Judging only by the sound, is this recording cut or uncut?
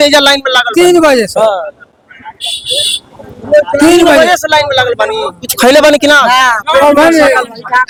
uncut